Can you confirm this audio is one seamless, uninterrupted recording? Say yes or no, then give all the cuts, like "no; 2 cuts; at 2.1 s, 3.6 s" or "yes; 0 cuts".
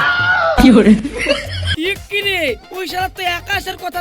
no; 1 cut; at 1.7 s